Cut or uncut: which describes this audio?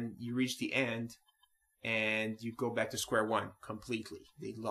uncut